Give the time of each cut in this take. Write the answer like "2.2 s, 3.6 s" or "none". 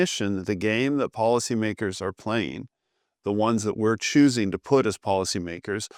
none